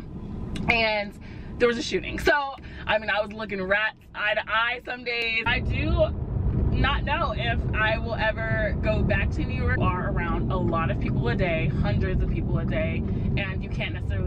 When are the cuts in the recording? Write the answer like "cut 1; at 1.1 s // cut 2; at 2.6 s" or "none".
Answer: cut 1; at 2.6 s // cut 2; at 5.4 s // cut 3; at 9.8 s

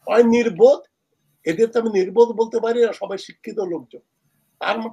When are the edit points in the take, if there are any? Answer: none

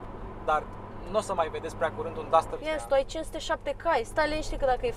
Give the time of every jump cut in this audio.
cut 1; at 2.5 s

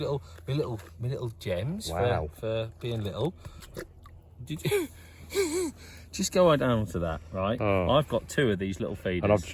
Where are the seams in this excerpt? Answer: none

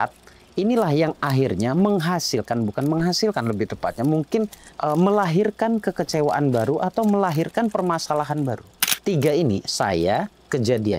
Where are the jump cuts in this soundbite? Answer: cut 1; at 9.0 s

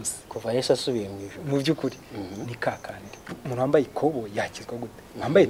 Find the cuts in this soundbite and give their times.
cut 1; at 3.3 s

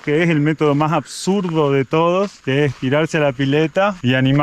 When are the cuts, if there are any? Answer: none

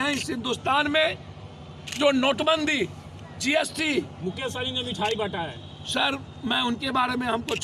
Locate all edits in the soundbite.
none

